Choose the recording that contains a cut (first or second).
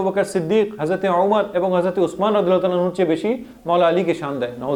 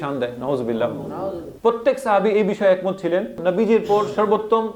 second